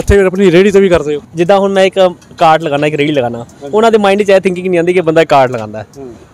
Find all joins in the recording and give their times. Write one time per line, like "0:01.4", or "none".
0:01.2